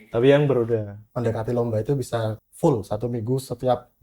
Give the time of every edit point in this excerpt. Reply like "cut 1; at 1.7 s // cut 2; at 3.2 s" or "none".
cut 1; at 1.0 s // cut 2; at 2.4 s